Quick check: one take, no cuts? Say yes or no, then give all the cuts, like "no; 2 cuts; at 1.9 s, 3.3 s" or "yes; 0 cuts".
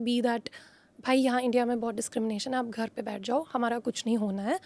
yes; 0 cuts